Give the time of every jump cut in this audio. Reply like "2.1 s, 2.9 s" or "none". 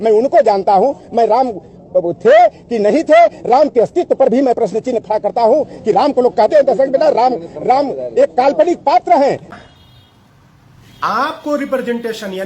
9.5 s

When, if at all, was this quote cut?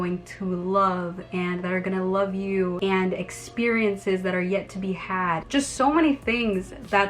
5.4 s

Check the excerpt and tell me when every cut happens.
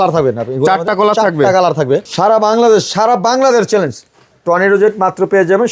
2.1 s

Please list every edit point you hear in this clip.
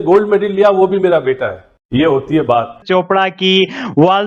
2.8 s

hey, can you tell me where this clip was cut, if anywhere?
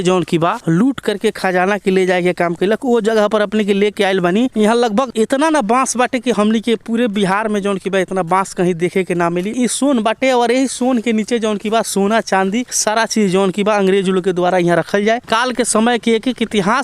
9.5 s, 15.2 s

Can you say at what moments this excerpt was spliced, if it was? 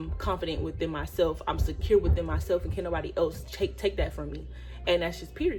none

